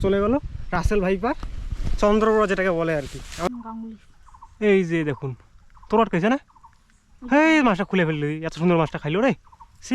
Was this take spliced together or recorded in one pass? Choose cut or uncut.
cut